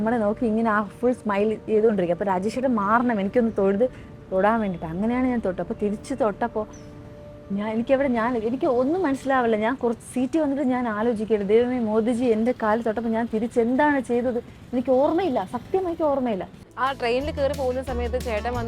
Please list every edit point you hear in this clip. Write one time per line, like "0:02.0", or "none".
0:16.6